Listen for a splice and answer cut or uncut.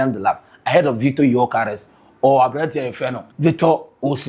cut